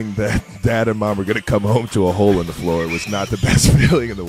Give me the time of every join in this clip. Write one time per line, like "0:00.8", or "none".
none